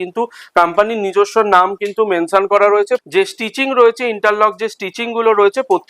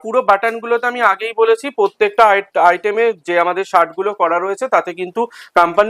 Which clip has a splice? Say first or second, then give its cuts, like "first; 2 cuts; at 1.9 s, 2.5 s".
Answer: first; 1 cut; at 3.0 s